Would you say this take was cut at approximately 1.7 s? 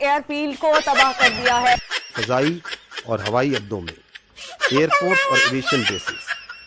no; 0 cuts

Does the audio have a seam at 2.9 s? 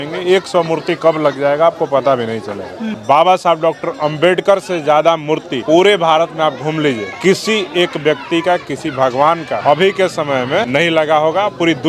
no; 4 cuts; at 5.5 s, 7.1 s, 9.5 s, 10.7 s

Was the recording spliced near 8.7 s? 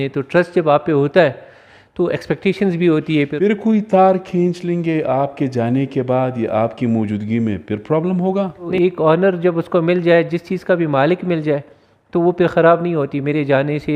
yes; 2 cuts; at 3.3 s, 8.7 s

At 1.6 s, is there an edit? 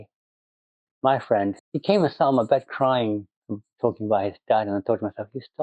yes; 1 cut; at 1.6 s

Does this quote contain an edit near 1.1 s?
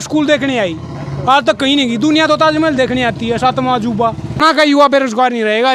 no; 1 cut; at 4.6 s

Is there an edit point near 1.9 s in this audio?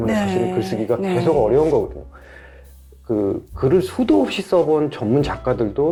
no; 0 cuts

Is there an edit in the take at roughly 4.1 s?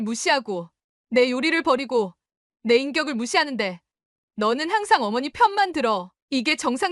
no; 0 cuts

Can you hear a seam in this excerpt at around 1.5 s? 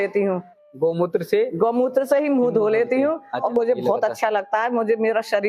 no; 1 cut; at 3.5 s

